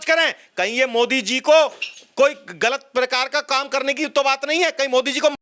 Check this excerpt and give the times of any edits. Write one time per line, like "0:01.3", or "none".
none